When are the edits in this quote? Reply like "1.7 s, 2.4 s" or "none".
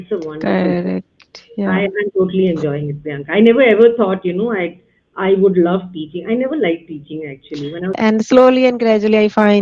8.2 s